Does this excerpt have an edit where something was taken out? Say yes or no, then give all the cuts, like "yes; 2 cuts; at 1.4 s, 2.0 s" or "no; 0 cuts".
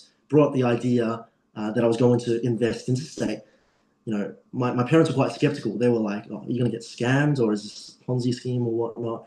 no; 0 cuts